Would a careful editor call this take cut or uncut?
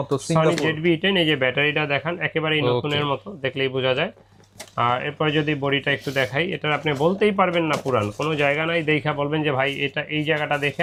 uncut